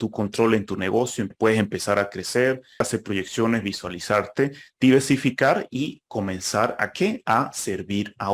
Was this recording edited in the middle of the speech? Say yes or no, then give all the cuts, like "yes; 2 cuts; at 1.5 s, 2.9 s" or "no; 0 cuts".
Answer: yes; 2 cuts; at 1.3 s, 2.9 s